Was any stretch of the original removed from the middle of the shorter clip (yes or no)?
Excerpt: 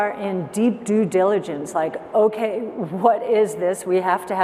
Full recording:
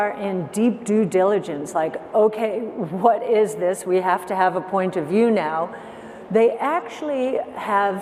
no